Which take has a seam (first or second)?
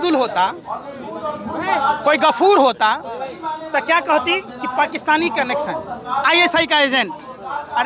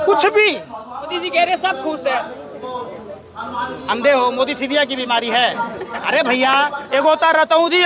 second